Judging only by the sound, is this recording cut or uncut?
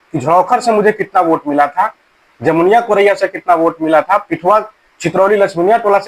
uncut